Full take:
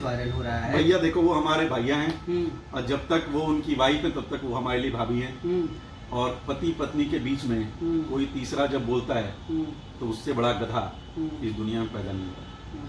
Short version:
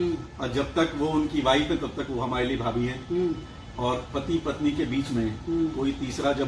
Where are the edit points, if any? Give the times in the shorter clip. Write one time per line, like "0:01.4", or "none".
none